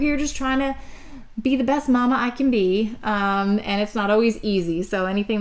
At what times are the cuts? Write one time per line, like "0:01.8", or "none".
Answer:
none